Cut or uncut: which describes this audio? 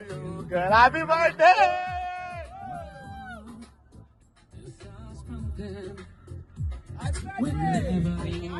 uncut